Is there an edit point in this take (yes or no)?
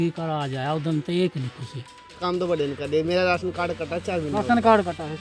yes